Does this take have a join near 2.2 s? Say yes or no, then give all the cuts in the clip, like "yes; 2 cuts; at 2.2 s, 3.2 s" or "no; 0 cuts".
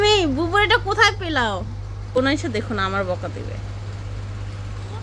yes; 1 cut; at 2.2 s